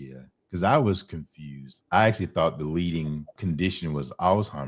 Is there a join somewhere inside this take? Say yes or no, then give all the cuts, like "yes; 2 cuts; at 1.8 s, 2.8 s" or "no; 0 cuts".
yes; 2 cuts; at 1.8 s, 3.3 s